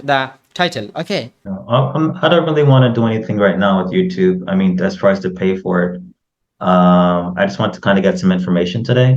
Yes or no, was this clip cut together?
yes